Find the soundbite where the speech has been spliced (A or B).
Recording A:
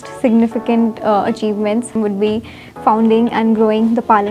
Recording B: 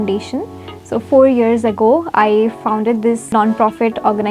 B